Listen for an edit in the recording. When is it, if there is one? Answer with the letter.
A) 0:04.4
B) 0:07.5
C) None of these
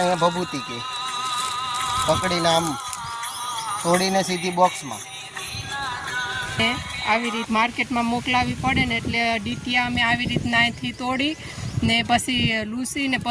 B